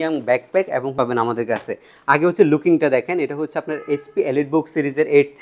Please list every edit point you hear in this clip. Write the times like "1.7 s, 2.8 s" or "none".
0.9 s